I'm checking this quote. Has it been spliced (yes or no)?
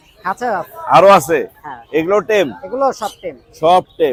no